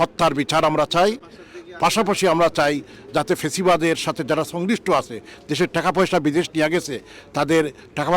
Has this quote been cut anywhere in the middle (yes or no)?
no